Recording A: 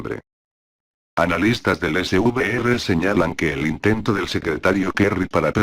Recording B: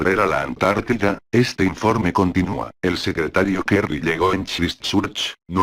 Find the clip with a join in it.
A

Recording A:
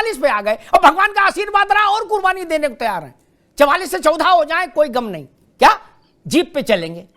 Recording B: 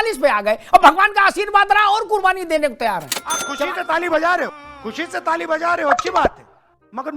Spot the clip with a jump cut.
A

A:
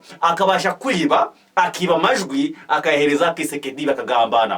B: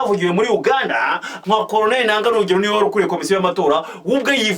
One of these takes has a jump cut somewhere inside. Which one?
B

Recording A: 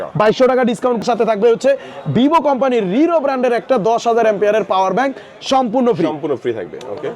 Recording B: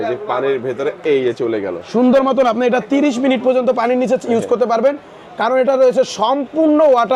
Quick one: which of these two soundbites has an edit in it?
A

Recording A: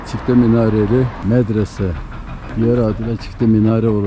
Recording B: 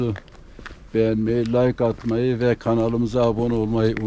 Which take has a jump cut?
A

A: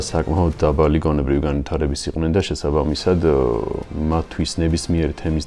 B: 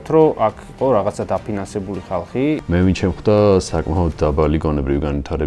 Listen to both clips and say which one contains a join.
B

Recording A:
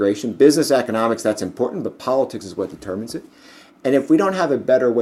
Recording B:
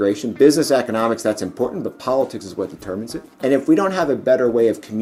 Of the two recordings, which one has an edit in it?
B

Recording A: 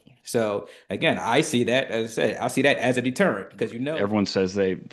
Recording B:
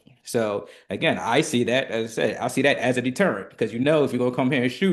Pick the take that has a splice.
A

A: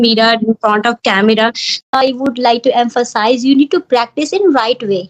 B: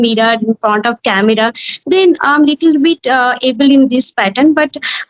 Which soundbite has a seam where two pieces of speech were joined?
A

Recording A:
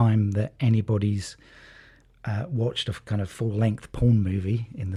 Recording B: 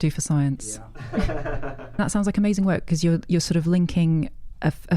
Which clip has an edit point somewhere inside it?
B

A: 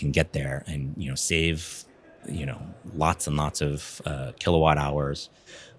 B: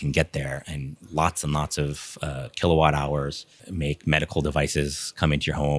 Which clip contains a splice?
B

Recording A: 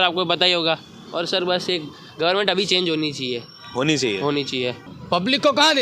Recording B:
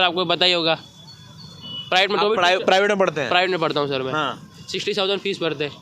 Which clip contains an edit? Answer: A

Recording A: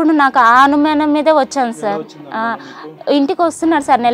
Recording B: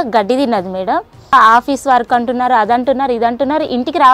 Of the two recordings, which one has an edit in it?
B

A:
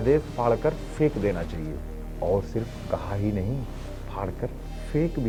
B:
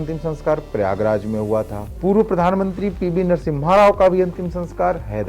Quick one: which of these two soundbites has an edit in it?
B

